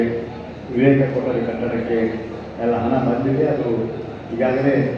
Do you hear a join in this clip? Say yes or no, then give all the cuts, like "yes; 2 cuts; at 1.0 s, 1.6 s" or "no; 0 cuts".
no; 0 cuts